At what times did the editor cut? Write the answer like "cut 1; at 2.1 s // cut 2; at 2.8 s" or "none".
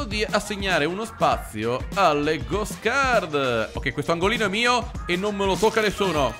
cut 1; at 3.7 s